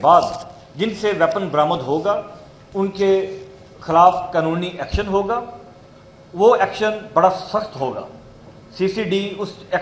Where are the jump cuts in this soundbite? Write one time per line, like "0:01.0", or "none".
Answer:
none